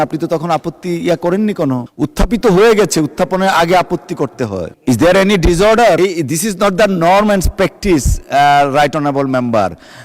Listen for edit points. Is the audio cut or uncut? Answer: cut